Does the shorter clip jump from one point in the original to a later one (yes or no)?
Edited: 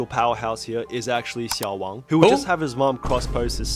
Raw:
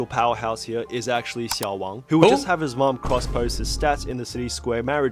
no